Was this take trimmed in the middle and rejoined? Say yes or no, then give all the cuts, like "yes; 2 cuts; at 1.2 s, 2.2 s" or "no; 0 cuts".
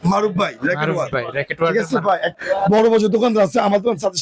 yes; 1 cut; at 2.4 s